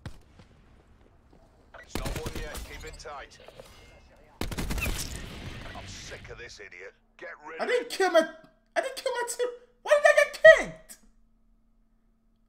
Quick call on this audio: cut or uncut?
uncut